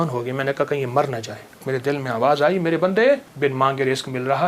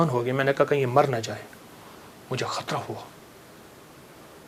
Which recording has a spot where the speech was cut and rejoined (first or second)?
first